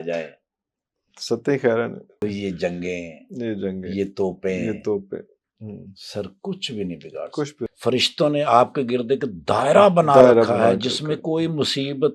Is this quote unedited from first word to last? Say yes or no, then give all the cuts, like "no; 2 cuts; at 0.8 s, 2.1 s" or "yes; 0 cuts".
no; 2 cuts; at 2.2 s, 7.6 s